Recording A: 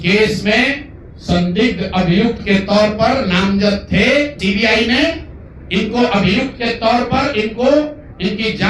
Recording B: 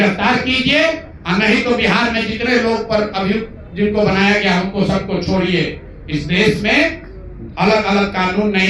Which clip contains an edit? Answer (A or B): A